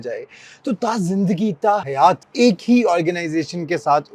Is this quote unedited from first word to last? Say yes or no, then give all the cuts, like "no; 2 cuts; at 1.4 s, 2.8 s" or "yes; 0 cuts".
no; 1 cut; at 1.9 s